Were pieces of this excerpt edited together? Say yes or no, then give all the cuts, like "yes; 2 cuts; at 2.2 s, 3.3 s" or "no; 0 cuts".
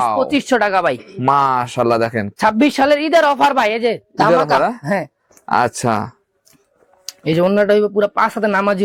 no; 0 cuts